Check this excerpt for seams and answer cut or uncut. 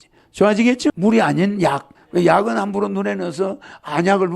cut